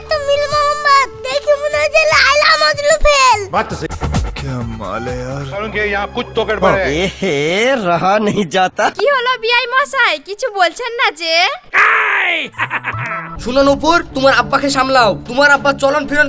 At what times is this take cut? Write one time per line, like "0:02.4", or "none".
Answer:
0:03.8
0:13.3